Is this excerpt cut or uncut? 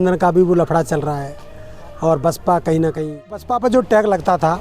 cut